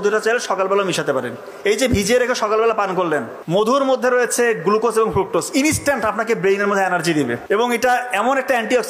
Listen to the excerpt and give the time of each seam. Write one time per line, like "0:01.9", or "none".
0:03.7
0:07.4